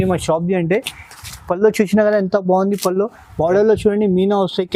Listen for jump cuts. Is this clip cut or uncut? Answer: uncut